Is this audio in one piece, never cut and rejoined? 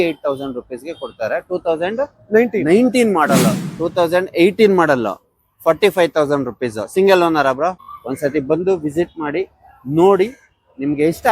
no; 2 cuts; at 3.6 s, 7.9 s

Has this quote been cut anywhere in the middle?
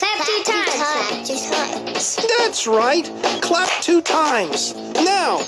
yes; 1 cut; at 4.4 s

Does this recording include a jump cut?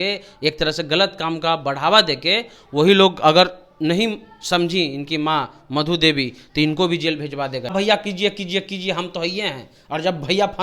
yes; 1 cut; at 7.7 s

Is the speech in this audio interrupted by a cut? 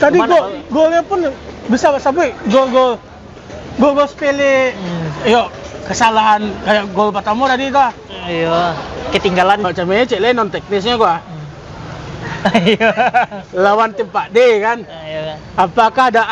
yes; 1 cut; at 9.6 s

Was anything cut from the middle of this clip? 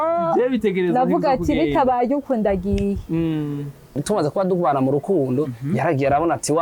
yes; 1 cut; at 4.0 s

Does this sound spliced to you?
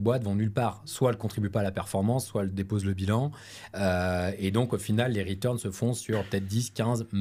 no; 0 cuts

